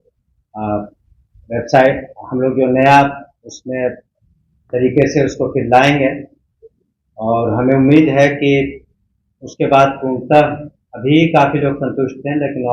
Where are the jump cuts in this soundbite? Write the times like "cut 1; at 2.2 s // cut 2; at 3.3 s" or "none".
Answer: none